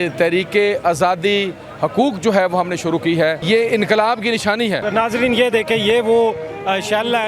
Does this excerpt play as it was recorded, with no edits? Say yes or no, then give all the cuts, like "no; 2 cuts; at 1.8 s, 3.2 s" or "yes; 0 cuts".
no; 2 cuts; at 3.4 s, 4.8 s